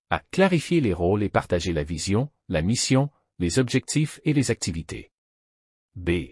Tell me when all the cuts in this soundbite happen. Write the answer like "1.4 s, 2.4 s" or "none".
1.0 s